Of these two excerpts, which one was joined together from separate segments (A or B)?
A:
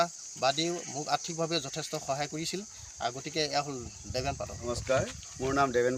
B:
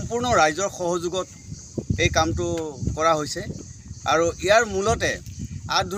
A